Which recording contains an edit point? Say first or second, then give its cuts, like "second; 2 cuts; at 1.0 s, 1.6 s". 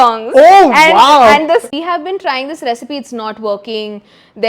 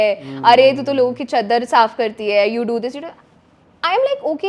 first; 1 cut; at 1.7 s